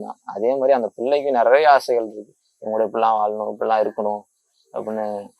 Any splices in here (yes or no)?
no